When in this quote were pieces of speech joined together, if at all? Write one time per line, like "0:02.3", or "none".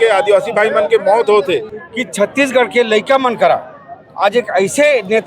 0:01.7

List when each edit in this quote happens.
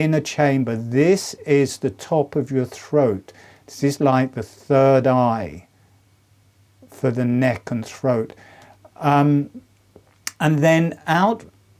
0:08.3

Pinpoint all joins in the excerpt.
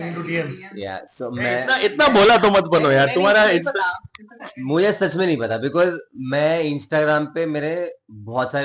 none

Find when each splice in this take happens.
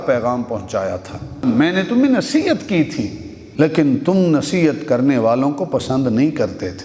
0:01.4
0:03.4

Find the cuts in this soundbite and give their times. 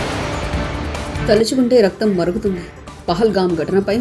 none

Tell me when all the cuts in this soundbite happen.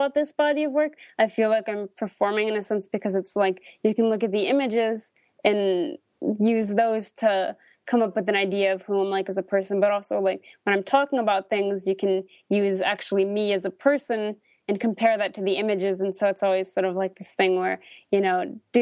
none

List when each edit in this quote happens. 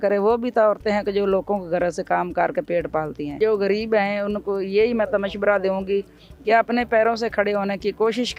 0:03.4

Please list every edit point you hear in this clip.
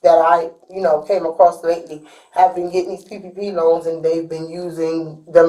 none

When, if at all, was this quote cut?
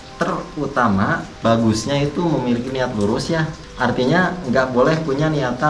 0:01.3
0:03.6

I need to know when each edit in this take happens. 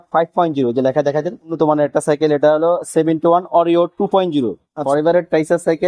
0:01.5
0:04.8

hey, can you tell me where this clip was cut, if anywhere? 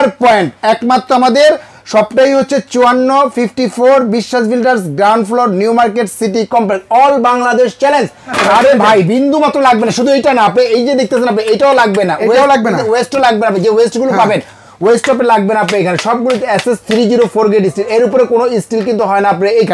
0:08.4

